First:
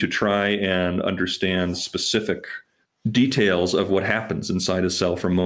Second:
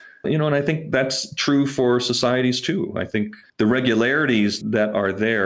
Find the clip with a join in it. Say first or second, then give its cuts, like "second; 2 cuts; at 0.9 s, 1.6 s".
second; 2 cuts; at 3.4 s, 4.6 s